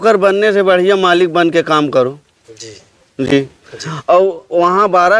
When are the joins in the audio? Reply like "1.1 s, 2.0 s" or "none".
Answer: none